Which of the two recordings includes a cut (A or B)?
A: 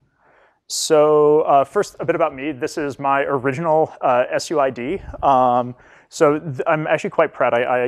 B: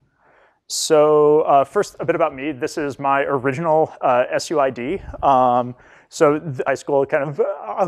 A